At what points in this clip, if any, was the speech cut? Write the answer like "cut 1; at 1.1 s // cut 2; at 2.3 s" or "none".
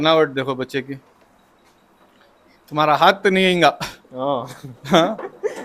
none